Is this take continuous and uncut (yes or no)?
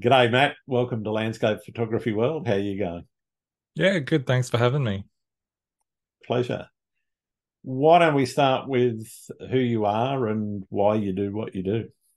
no